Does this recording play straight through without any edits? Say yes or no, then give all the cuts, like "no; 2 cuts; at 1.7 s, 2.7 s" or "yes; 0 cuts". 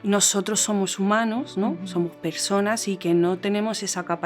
yes; 0 cuts